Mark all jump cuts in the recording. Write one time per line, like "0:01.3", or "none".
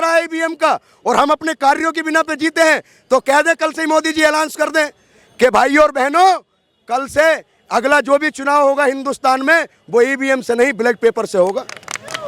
none